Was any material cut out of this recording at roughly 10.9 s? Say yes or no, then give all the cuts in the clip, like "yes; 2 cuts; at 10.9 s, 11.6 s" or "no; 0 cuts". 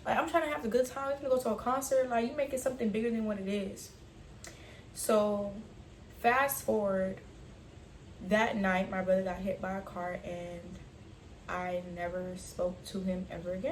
no; 0 cuts